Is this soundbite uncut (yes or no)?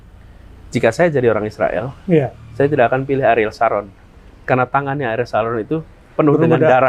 yes